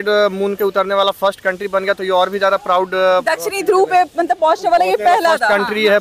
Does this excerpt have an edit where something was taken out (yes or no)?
no